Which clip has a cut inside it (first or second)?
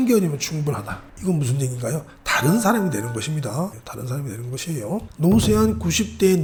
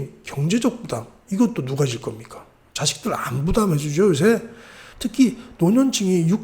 second